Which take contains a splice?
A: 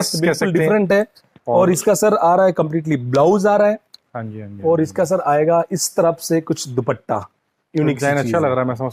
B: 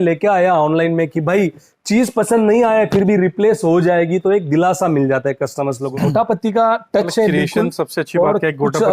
B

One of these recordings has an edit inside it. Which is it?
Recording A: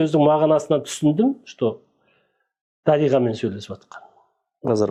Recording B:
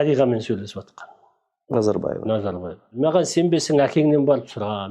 B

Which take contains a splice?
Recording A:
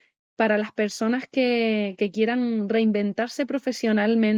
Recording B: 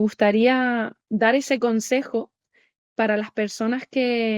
B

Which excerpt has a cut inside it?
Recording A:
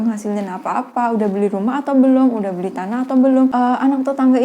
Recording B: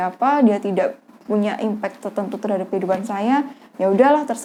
A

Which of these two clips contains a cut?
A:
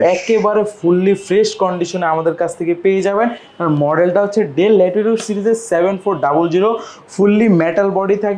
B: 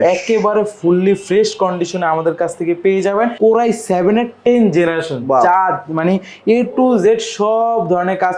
B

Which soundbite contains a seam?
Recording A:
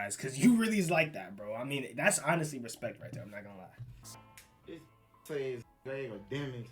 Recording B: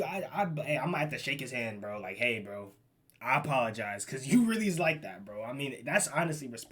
A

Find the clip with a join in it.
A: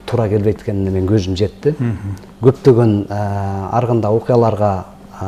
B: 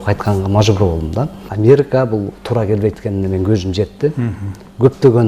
B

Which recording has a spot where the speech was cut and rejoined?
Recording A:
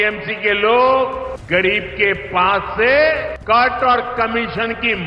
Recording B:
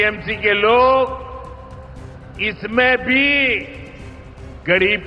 A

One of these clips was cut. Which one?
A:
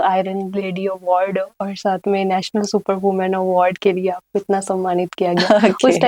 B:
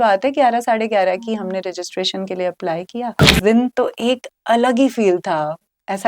B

